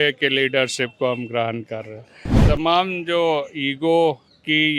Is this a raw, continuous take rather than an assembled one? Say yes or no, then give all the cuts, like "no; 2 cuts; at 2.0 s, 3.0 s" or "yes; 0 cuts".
no; 1 cut; at 2.3 s